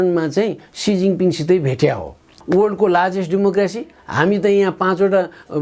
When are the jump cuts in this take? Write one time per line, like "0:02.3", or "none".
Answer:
0:02.4